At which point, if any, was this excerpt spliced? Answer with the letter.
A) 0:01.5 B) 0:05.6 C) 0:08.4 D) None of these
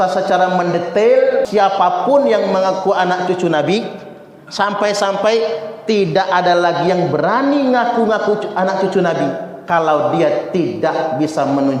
A